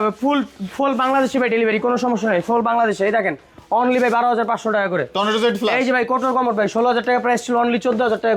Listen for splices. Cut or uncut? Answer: uncut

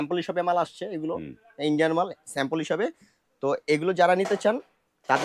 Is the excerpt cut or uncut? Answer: uncut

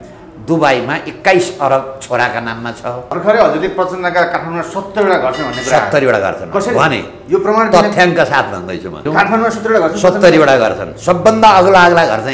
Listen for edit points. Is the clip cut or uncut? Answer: cut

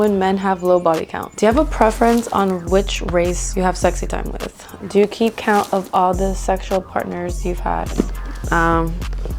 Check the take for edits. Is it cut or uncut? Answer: cut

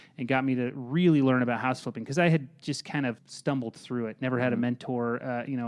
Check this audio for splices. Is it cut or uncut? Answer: cut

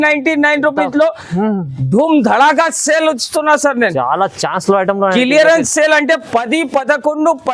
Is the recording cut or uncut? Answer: uncut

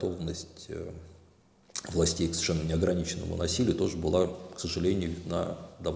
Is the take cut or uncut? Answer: uncut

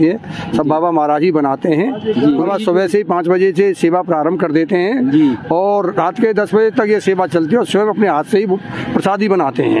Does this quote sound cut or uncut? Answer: cut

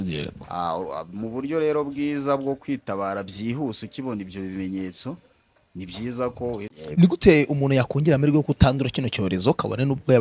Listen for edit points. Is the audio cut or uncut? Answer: cut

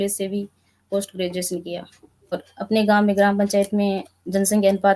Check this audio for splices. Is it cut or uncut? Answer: cut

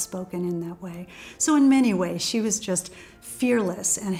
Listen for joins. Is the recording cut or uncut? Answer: uncut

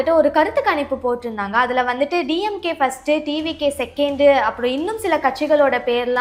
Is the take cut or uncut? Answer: uncut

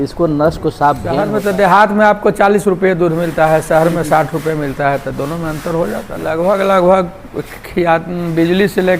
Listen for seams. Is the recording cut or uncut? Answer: cut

